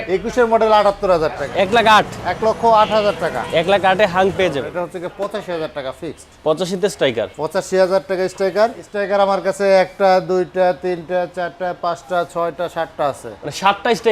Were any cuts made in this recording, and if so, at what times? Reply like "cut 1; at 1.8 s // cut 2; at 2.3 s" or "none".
cut 1; at 1.5 s // cut 2; at 4.7 s // cut 3; at 8.9 s